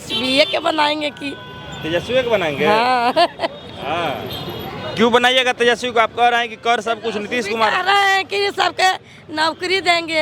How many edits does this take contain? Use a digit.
0